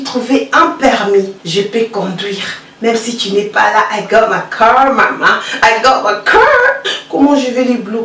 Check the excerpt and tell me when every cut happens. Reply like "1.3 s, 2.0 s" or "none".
1.4 s, 6.9 s

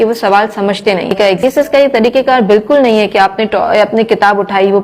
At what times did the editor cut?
1.4 s

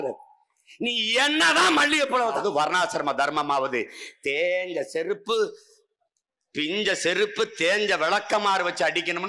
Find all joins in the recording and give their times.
2.3 s

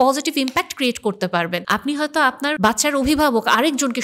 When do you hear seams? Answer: 1.6 s, 2.6 s

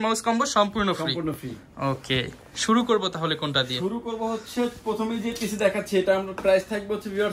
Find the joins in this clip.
none

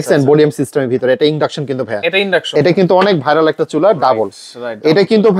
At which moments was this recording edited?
2.5 s

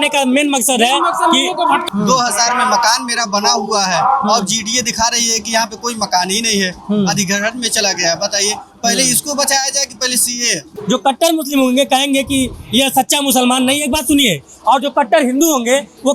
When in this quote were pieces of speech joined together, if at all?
1.9 s, 10.7 s

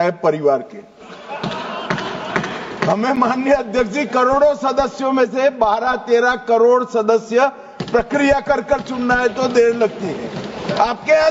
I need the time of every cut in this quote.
none

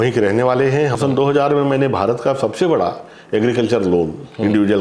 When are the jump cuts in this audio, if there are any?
0.9 s

